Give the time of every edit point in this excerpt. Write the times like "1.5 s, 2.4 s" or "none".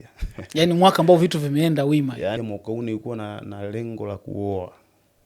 2.4 s